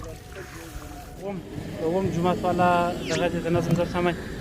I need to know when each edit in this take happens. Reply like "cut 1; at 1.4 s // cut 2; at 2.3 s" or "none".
cut 1; at 1.3 s